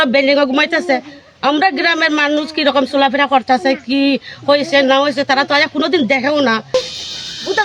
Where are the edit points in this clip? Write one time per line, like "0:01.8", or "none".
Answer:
0:06.8

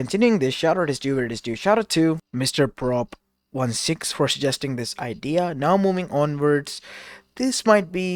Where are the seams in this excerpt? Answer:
0:02.3

